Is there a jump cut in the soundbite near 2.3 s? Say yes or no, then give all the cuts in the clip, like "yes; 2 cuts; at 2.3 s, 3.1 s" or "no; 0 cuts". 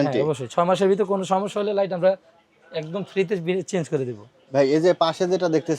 no; 0 cuts